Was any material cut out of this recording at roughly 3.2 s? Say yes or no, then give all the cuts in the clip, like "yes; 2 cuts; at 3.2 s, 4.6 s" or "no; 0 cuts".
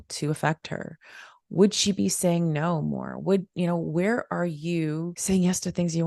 no; 1 cut; at 5.1 s